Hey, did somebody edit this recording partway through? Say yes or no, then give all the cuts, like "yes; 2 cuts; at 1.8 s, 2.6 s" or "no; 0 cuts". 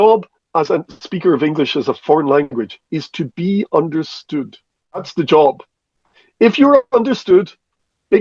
yes; 1 cut; at 5.1 s